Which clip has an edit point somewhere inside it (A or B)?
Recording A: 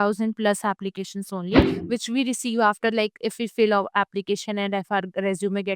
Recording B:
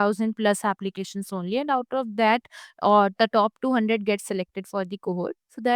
A